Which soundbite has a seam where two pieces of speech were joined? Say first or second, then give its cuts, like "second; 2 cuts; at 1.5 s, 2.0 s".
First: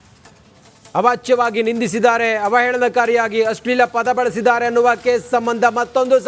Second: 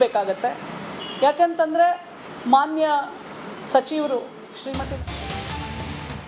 second; 1 cut; at 5.0 s